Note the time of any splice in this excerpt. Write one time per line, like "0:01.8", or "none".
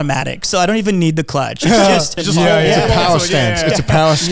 0:02.1